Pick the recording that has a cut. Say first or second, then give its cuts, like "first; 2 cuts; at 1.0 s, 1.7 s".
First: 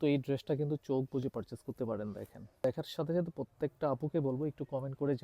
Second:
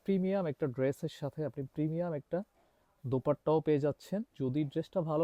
first; 1 cut; at 2.6 s